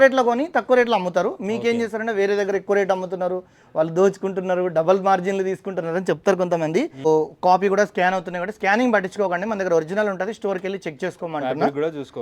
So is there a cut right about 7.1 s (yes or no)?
yes